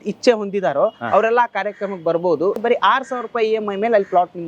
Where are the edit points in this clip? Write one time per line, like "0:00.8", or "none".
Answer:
0:02.6